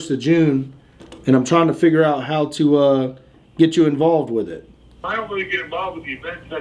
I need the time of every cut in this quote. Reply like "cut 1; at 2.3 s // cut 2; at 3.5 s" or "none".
cut 1; at 5.0 s